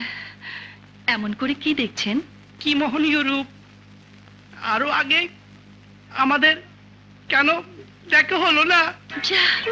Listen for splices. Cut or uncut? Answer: uncut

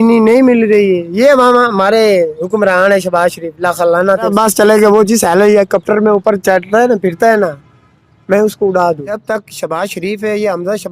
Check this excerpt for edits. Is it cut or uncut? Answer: cut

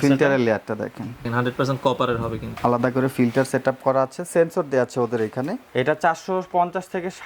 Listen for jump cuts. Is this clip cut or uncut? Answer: cut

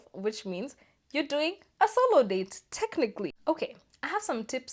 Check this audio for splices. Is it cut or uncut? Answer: cut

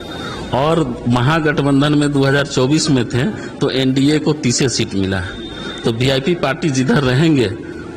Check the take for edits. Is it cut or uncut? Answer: uncut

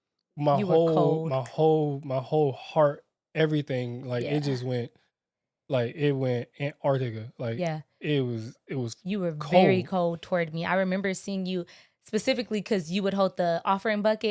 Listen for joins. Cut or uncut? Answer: uncut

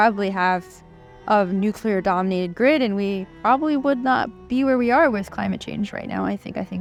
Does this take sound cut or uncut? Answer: uncut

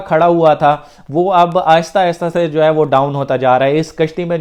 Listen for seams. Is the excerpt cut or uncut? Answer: uncut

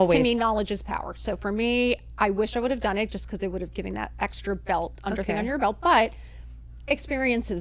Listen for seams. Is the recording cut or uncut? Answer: uncut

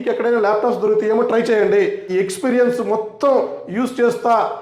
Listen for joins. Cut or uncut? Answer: cut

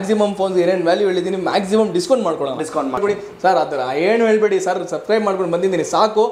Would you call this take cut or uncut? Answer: cut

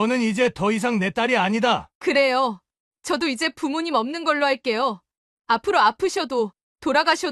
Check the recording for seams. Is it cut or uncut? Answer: cut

